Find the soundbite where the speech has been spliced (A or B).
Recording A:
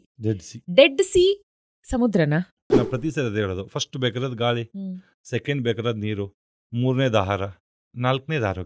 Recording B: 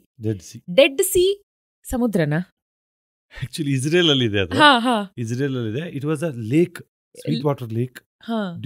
A